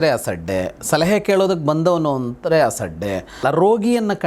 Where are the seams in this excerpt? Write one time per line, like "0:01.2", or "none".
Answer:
0:03.3